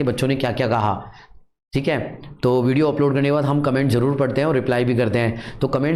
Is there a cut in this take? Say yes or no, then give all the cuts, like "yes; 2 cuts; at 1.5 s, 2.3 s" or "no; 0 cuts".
no; 0 cuts